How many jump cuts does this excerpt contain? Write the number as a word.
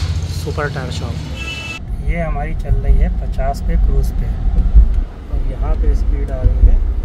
one